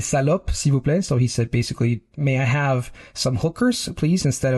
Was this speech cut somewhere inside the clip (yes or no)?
yes